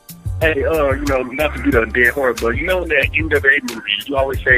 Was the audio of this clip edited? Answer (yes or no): yes